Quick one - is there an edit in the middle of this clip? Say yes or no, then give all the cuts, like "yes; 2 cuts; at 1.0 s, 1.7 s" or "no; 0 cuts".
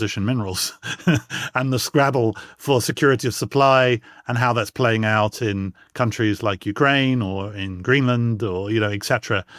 no; 0 cuts